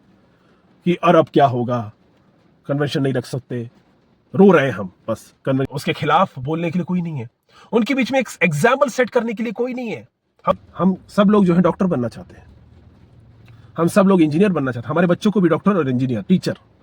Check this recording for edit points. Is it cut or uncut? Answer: cut